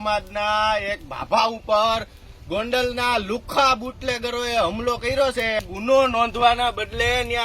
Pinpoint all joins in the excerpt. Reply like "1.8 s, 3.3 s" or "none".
5.6 s